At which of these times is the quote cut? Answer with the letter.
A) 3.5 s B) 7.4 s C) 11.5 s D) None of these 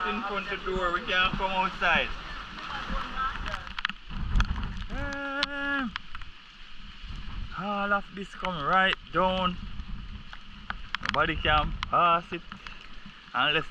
A